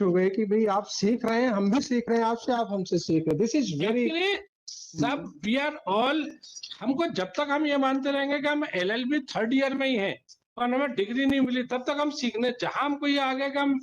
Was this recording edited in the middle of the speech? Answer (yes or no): no